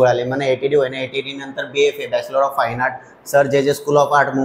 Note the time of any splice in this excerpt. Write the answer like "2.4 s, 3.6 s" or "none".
none